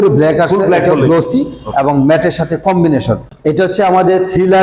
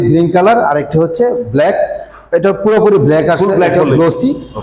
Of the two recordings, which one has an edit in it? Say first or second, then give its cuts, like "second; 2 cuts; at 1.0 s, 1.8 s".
first; 1 cut; at 3.3 s